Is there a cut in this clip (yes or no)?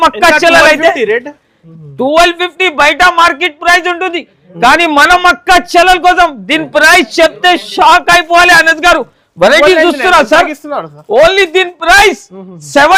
no